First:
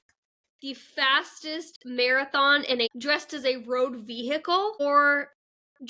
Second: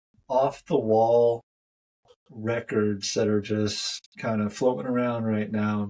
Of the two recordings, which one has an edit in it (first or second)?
first